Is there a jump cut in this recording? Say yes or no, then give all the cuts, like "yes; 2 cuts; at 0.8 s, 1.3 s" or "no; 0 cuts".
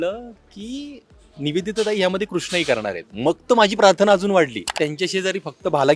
yes; 1 cut; at 4.7 s